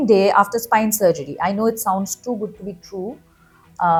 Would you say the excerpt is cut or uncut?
uncut